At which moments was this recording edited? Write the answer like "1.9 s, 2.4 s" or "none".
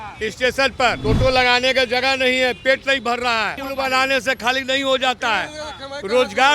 1.0 s, 3.6 s